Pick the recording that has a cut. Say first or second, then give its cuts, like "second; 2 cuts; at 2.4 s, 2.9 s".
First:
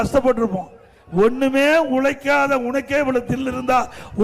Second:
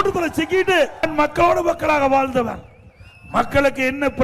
second; 1 cut; at 1.1 s